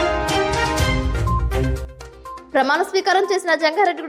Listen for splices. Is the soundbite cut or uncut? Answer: uncut